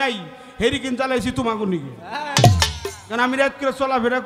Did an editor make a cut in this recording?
no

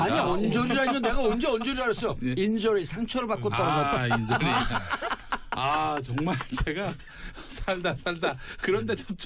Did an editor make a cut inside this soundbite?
no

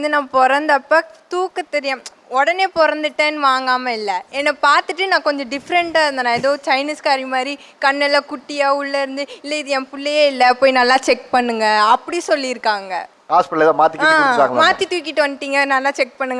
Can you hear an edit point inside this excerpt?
no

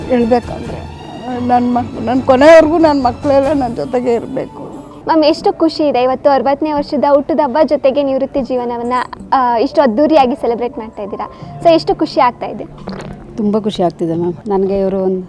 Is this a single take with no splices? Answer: no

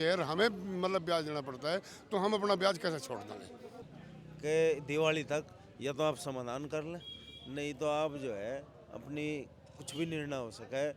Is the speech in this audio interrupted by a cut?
yes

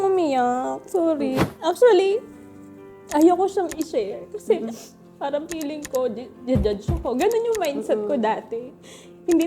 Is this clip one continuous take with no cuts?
no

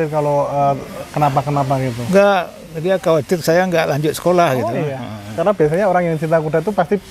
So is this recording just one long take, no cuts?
yes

